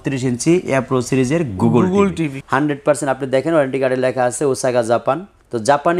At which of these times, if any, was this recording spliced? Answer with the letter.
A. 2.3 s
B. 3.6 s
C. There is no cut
A